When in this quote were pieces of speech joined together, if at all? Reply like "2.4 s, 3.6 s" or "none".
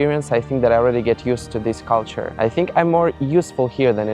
2.2 s